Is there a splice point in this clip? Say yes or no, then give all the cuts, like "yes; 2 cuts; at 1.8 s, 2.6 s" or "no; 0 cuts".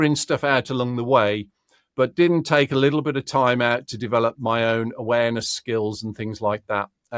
no; 0 cuts